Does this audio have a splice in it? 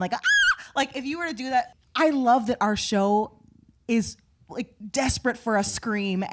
yes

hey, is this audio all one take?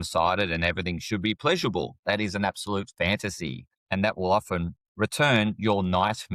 no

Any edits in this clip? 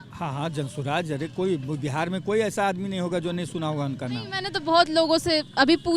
no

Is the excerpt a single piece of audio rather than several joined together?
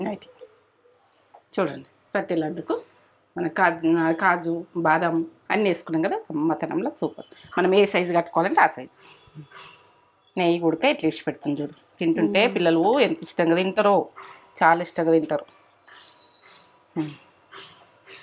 yes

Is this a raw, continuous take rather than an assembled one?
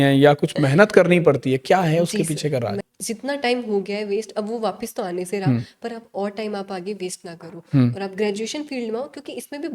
no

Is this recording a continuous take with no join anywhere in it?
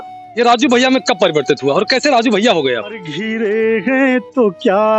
no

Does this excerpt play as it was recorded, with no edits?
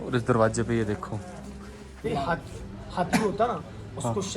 no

